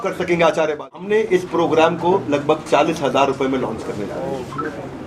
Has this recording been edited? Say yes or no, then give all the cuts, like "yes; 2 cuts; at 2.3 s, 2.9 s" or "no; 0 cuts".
yes; 1 cut; at 1.1 s